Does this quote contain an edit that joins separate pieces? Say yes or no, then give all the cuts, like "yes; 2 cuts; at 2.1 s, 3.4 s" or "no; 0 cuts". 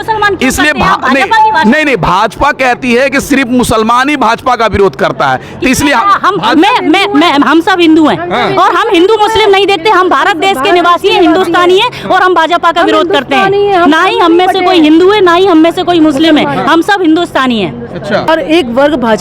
yes; 1 cut; at 18.3 s